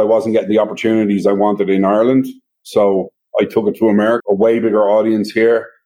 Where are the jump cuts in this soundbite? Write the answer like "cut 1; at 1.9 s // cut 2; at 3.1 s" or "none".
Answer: cut 1; at 4.2 s